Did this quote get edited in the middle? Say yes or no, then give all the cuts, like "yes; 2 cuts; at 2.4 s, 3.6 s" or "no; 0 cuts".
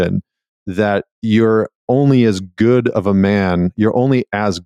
no; 0 cuts